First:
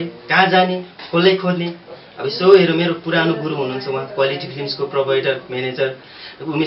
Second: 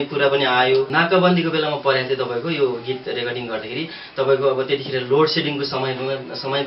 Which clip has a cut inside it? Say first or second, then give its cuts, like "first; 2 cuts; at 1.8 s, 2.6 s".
second; 1 cut; at 0.9 s